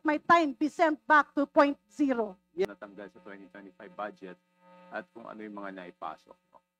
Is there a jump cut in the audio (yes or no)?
yes